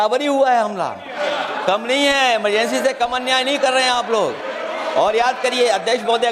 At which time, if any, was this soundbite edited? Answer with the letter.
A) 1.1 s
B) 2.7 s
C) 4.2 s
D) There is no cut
A